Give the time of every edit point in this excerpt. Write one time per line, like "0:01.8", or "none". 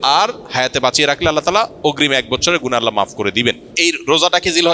0:03.7